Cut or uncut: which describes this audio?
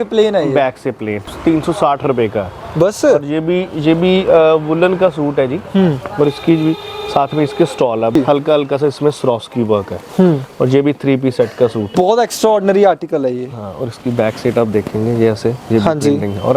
cut